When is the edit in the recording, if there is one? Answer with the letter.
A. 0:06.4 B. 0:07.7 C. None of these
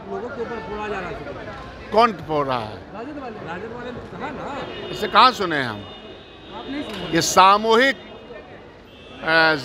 C